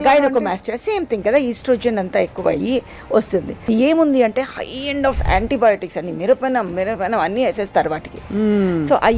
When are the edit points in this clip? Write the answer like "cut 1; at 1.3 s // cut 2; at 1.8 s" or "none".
cut 1; at 3.7 s